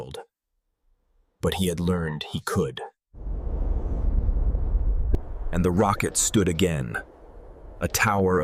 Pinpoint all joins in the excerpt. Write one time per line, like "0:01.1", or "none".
0:05.2

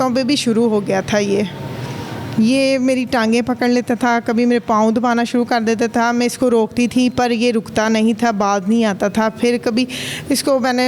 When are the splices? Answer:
none

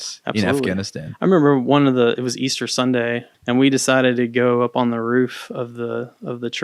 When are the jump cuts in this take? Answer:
0:03.3

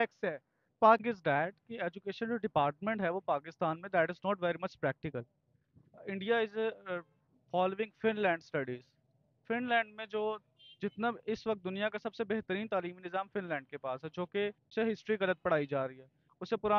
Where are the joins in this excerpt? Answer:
0:01.0
0:14.6

